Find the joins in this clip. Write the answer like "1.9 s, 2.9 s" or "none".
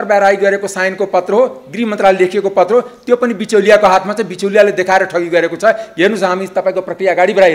none